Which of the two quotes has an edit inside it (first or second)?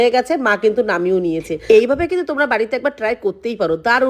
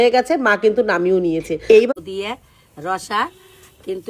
second